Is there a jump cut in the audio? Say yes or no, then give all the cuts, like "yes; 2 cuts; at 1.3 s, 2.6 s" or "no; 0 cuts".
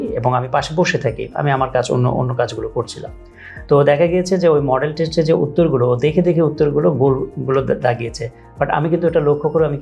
no; 0 cuts